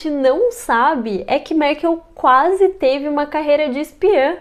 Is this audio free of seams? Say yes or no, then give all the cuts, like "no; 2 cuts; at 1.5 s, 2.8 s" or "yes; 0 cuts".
yes; 0 cuts